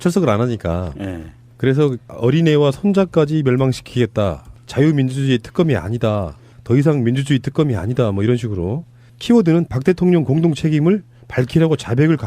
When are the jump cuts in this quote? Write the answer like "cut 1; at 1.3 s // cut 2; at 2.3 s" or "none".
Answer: cut 1; at 11.3 s

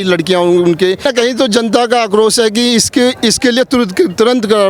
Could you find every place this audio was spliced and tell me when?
cut 1; at 1.1 s

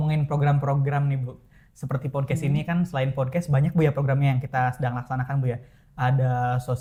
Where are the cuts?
none

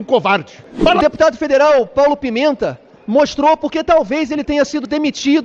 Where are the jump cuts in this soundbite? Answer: cut 1; at 1.0 s

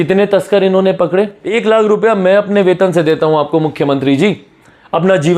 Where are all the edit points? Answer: cut 1; at 1.4 s

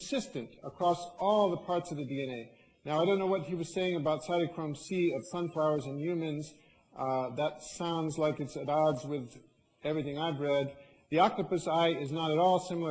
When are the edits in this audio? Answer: cut 1; at 9.9 s

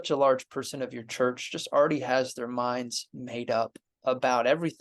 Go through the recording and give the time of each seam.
cut 1; at 3.9 s

